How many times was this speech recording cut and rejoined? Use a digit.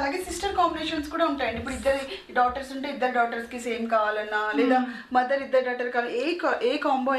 0